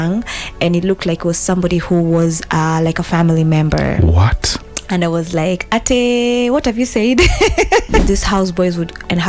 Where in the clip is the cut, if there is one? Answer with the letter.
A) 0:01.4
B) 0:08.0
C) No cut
B